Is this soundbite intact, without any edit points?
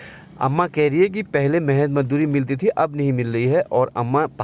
yes; 0 cuts

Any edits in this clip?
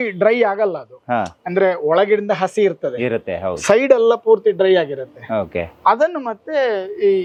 no; 0 cuts

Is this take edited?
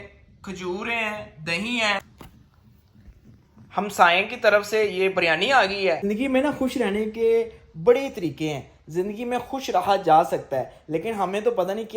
yes; 2 cuts; at 2.0 s, 6.1 s

